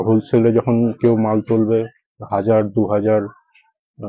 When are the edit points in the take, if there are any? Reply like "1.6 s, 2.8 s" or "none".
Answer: none